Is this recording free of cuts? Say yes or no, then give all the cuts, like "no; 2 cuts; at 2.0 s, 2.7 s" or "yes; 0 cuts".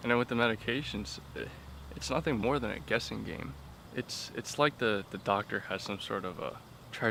yes; 0 cuts